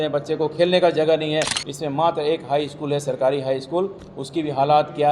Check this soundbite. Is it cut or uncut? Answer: cut